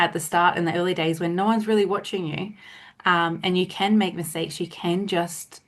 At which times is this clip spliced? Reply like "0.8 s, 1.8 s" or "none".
none

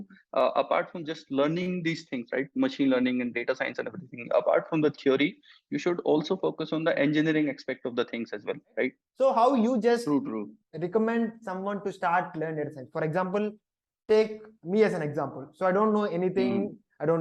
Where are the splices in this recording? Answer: 9.0 s

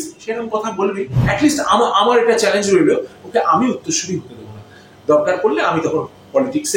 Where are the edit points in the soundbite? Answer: 1.2 s

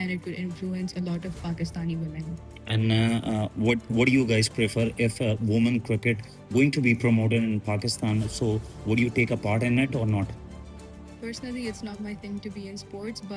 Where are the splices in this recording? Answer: none

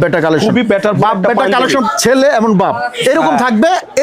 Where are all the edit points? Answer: 1.8 s

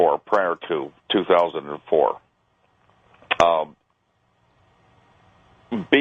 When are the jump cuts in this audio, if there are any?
4.4 s

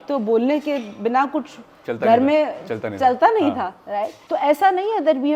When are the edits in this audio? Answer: 4.2 s

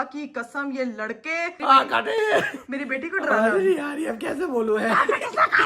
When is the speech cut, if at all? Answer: 1.6 s

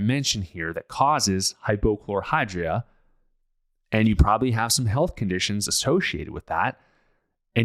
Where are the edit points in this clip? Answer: none

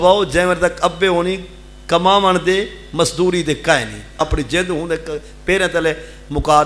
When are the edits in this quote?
4.2 s

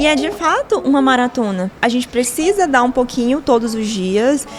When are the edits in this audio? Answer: 1.7 s

